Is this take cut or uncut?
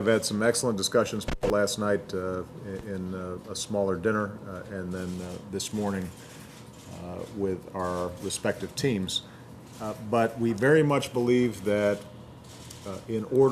cut